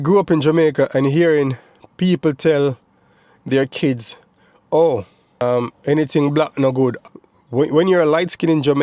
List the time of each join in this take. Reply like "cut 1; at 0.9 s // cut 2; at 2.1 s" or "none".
cut 1; at 7.0 s